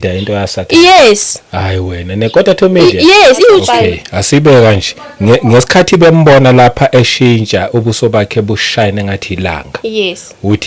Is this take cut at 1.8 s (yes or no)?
no